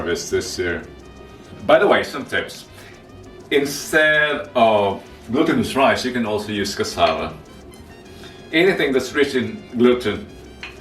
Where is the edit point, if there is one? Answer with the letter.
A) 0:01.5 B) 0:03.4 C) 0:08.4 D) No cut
A